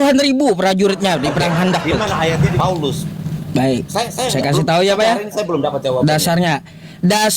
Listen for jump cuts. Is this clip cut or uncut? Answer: cut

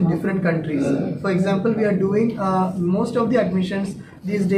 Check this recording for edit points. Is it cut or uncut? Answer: uncut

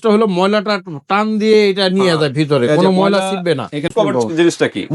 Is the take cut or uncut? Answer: cut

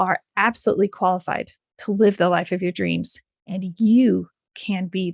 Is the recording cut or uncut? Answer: uncut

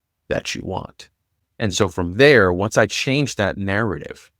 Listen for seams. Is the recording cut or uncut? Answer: uncut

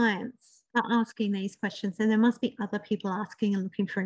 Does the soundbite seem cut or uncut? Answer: uncut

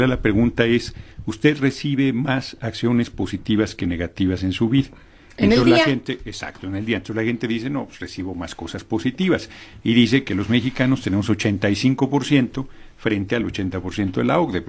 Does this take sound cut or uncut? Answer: cut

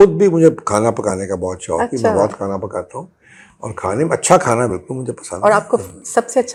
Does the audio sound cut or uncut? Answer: uncut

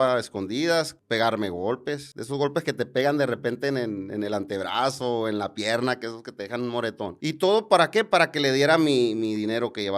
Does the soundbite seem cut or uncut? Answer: cut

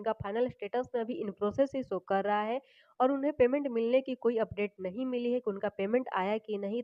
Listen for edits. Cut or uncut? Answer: uncut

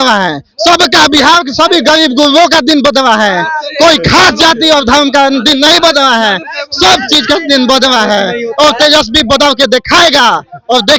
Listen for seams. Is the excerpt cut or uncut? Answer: uncut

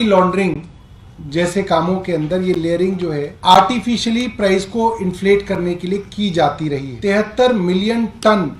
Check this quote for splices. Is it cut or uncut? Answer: cut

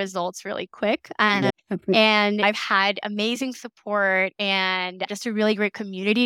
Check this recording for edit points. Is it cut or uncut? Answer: cut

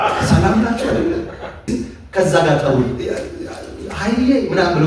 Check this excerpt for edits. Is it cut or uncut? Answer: cut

